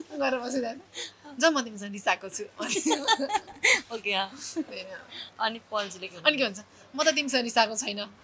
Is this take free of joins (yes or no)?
yes